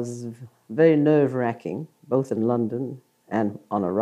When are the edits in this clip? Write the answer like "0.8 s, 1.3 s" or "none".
2.7 s